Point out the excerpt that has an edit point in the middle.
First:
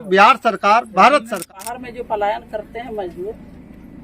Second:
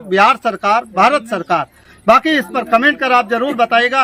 first; 1 cut; at 1.4 s

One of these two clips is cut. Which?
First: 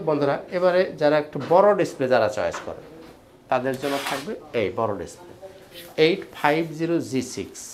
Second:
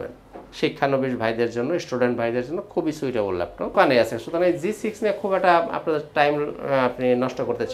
second; 1 cut; at 3.7 s

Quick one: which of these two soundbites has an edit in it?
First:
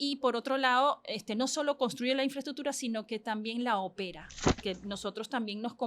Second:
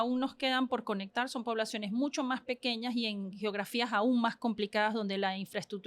first; 1 cut; at 4.6 s

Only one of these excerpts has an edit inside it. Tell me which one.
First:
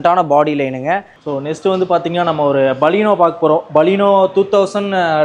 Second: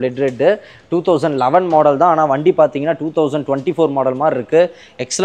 first; 1 cut; at 1.1 s

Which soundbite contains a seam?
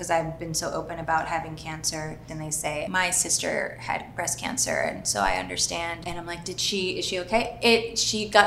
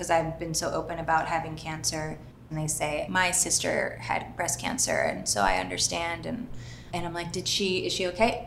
first; 2 cuts; at 2.8 s, 6.0 s

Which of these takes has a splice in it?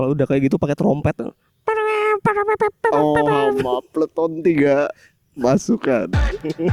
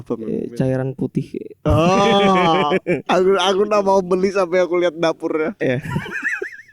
second; 3 cuts; at 1.4 s, 3.1 s, 5.6 s

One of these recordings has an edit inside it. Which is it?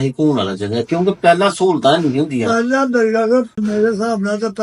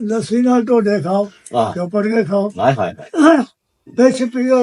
first; 1 cut; at 3.6 s

